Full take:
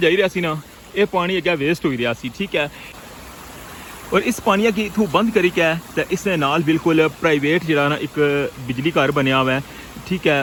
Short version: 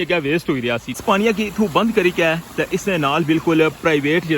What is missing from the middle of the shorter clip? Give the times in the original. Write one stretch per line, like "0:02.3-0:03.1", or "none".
0:02.3-0:04.4